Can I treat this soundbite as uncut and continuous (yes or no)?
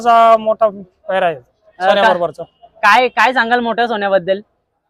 yes